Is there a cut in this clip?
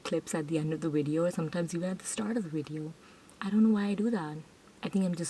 no; 0 cuts

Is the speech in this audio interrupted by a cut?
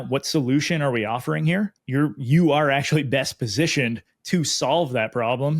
yes; 1 cut; at 1.8 s

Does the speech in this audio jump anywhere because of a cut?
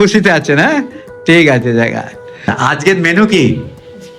yes; 1 cut; at 2.5 s

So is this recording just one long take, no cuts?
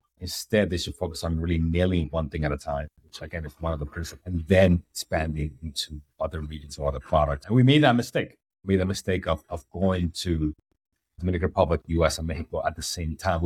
no; 2 cuts; at 4.1 s, 7.4 s

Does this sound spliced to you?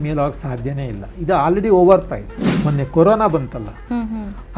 yes; 1 cut; at 2.4 s

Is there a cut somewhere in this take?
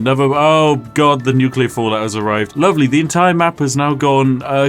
no; 0 cuts

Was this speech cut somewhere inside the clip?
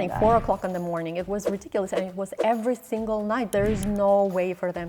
yes; 1 cut; at 3.5 s

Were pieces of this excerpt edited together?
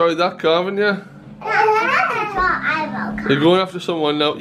no; 0 cuts

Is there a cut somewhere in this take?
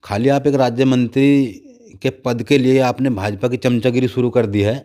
no; 0 cuts

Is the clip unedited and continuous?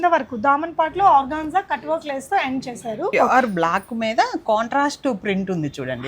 no; 1 cut; at 3.1 s

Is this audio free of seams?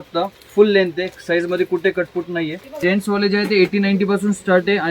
no; 1 cut; at 2.8 s

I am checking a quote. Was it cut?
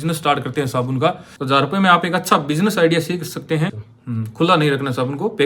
yes; 2 cuts; at 1.3 s, 3.9 s

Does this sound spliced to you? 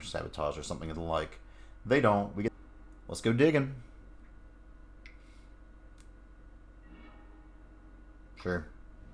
yes; 1 cut; at 2.6 s

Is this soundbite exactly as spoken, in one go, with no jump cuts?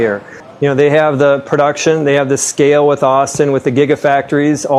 yes; 0 cuts

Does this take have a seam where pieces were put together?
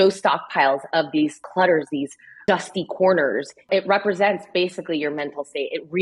yes; 3 cuts; at 1.4 s, 2.4 s, 3.5 s

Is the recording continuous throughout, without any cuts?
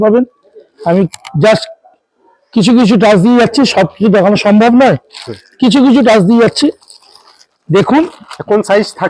yes; 0 cuts

